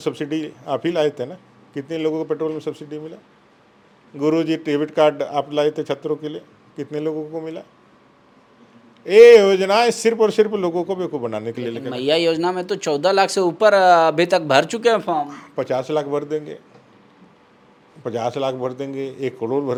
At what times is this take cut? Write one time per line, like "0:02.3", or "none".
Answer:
none